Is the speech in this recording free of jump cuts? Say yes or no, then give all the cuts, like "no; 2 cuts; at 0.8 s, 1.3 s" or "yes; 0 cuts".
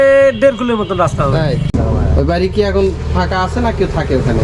no; 1 cut; at 1.7 s